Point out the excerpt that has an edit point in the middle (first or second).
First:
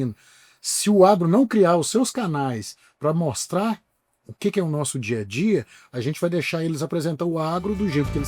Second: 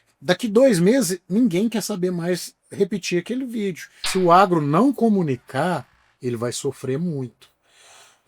second